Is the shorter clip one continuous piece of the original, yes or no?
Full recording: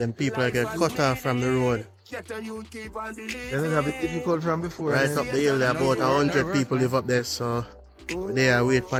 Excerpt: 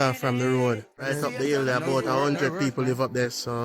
no